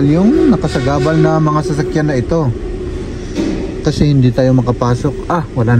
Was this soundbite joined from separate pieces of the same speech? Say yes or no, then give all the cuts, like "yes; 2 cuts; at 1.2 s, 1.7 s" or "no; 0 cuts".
no; 0 cuts